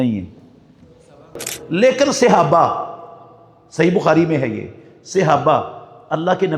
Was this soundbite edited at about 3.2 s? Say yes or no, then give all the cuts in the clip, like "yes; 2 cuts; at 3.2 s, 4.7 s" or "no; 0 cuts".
no; 1 cut; at 1.5 s